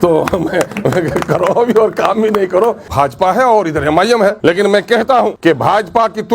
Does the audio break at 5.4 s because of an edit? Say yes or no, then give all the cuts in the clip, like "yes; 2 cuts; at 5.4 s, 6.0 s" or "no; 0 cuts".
yes; 3 cuts; at 2.8 s, 4.4 s, 5.4 s